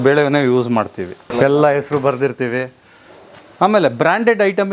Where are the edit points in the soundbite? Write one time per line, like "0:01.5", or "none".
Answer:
0:01.3